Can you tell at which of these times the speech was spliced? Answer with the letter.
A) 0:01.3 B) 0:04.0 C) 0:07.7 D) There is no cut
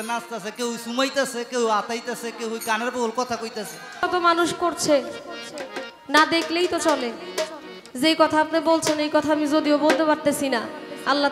B